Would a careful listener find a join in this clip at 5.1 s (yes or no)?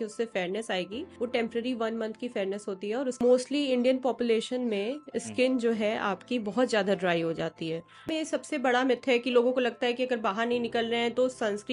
no